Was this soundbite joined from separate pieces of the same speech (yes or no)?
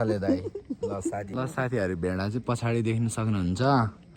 yes